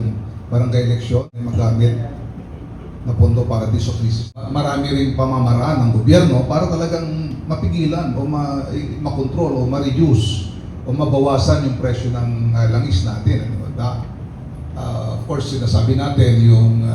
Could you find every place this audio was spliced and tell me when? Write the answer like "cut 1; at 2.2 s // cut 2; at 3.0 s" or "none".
cut 1; at 1.3 s // cut 2; at 4.4 s